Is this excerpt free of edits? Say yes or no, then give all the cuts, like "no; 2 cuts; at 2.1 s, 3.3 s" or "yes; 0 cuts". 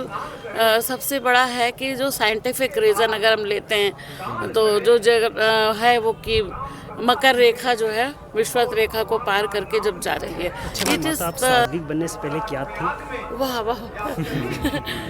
no; 1 cut; at 11.7 s